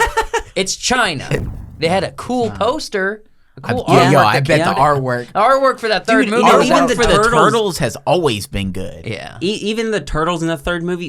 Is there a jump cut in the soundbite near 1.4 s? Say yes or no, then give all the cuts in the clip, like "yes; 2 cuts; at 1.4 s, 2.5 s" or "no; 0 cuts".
yes; 1 cut; at 1.4 s